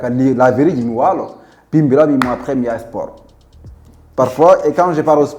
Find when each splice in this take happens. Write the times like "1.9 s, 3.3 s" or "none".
none